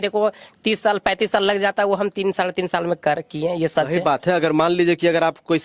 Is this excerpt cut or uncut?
uncut